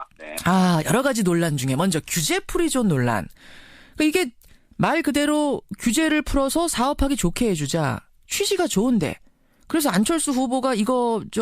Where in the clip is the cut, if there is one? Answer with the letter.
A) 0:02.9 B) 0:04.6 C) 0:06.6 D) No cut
A